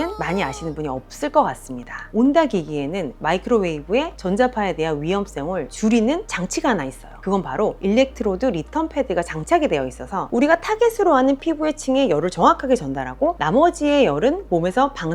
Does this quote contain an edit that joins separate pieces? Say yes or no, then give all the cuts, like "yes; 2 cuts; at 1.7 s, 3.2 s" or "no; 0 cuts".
no; 0 cuts